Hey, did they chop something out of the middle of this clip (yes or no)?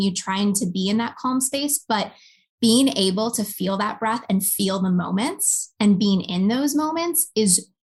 no